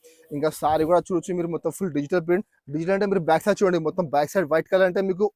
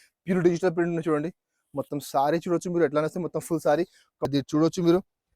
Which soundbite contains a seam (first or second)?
second